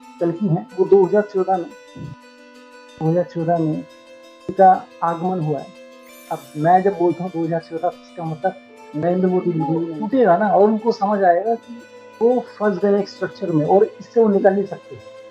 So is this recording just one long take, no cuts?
no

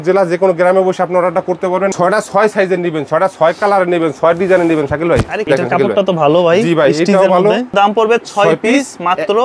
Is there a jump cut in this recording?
yes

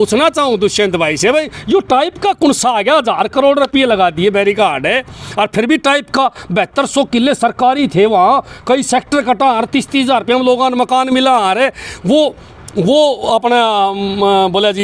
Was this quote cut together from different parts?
no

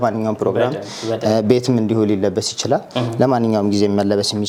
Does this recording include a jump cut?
no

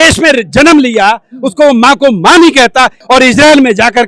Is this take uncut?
no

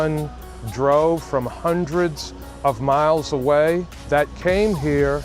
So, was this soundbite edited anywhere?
yes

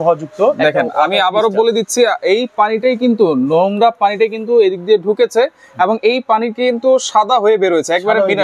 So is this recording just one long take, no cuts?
yes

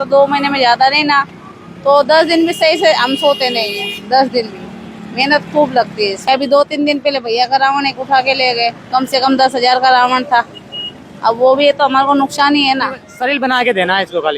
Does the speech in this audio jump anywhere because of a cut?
yes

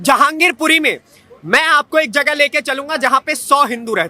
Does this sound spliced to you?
no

